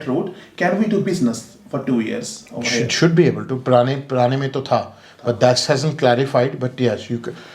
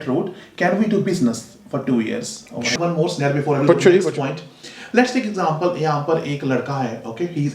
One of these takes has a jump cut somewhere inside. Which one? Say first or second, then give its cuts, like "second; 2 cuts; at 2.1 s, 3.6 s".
second; 1 cut; at 2.7 s